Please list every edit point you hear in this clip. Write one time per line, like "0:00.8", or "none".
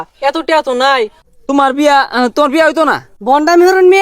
0:01.2
0:03.1